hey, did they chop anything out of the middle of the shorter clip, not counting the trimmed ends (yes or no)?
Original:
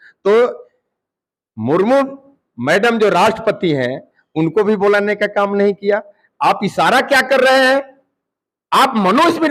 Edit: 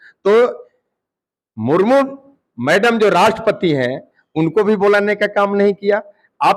no